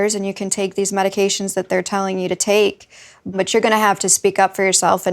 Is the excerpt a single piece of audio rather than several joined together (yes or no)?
no